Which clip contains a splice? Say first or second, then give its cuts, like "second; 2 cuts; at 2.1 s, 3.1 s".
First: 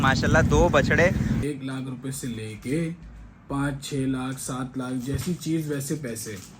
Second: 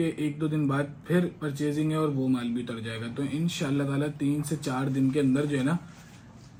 first; 1 cut; at 1.4 s